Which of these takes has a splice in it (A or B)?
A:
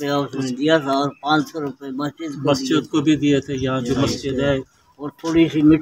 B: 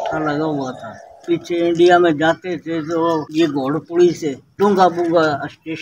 B